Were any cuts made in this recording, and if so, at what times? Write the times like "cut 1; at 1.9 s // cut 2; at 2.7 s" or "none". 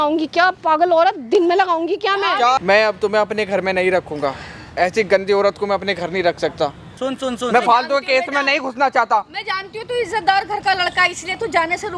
cut 1; at 2.6 s // cut 2; at 6.9 s

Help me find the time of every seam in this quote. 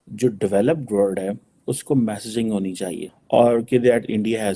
cut 1; at 3.1 s

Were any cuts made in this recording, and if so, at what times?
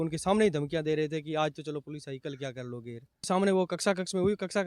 cut 1; at 3.3 s

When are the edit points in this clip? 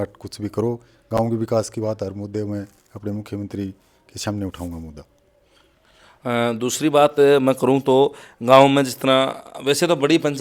none

